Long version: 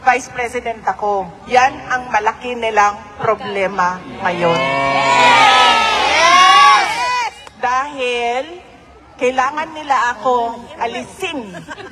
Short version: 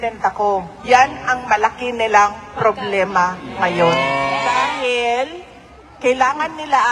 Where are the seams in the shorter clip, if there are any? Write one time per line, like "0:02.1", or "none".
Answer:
0:04.5